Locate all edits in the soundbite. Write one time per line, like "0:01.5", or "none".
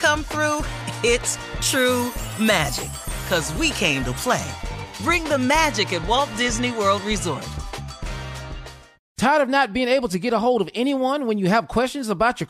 0:09.0